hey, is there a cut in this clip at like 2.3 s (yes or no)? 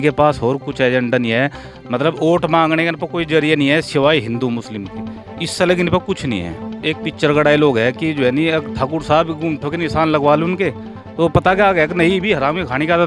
no